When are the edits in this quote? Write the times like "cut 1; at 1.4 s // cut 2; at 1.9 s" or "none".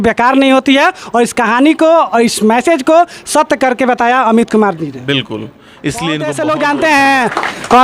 cut 1; at 6.2 s